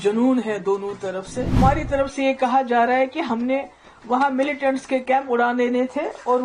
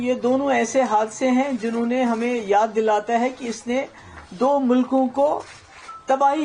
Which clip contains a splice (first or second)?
first